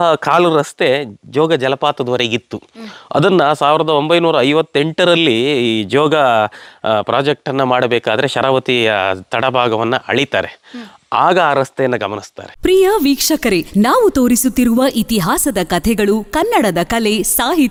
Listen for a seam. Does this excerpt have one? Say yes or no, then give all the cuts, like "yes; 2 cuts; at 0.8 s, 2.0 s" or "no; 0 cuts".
no; 0 cuts